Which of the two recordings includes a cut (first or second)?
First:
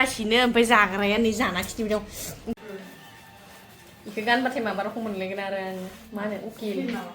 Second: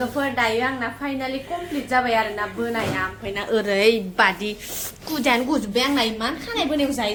first